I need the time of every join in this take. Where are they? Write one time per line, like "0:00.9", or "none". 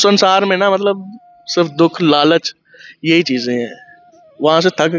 none